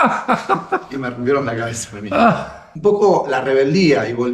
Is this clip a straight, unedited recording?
no; 1 cut; at 2.6 s

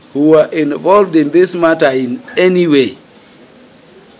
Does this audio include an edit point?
no; 0 cuts

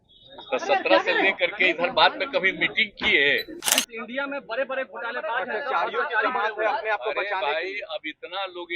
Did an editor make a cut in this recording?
yes; 1 cut; at 3.6 s

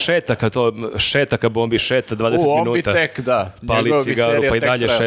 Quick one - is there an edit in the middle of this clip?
no; 0 cuts

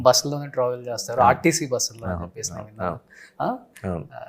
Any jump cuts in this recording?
no; 0 cuts

